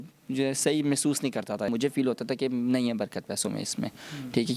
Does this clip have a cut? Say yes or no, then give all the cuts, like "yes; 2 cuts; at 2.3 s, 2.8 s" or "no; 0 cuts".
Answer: yes; 1 cut; at 1.7 s